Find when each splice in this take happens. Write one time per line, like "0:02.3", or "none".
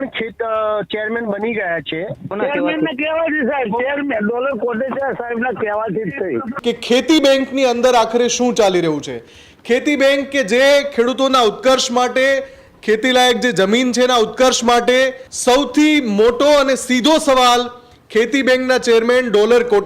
0:02.3
0:06.5
0:15.3